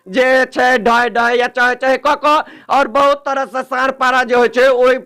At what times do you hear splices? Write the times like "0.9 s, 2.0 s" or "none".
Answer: none